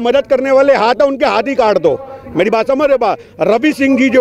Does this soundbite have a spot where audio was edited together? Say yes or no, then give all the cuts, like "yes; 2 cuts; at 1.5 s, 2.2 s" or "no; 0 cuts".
no; 0 cuts